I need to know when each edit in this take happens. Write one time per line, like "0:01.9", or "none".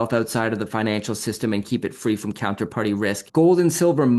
0:03.2